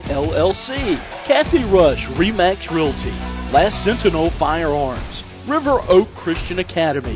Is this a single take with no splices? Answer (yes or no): no